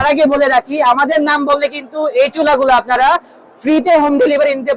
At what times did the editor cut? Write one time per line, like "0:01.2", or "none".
none